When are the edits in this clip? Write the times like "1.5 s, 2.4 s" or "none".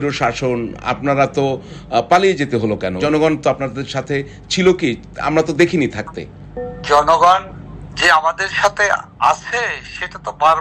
3.0 s